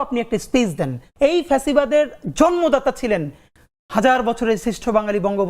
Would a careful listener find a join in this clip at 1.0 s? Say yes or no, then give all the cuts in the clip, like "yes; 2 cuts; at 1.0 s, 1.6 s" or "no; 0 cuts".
yes; 1 cut; at 1.0 s